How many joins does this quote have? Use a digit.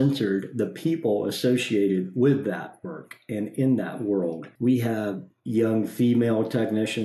2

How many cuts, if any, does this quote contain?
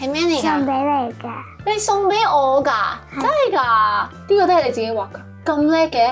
1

